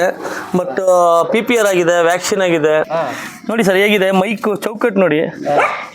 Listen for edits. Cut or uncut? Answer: cut